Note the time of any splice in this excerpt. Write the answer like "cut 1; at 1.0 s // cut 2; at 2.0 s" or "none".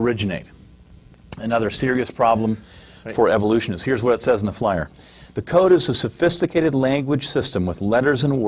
cut 1; at 3.3 s